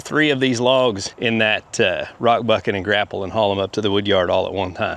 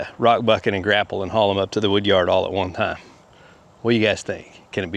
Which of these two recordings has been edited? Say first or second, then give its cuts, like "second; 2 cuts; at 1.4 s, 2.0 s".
first; 1 cut; at 1.1 s